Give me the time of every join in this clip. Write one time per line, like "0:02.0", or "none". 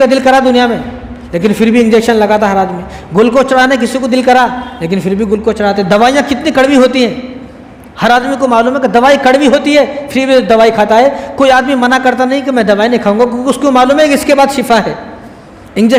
none